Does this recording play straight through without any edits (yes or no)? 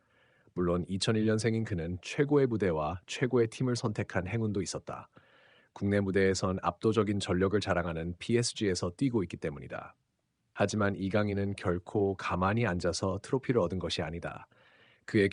yes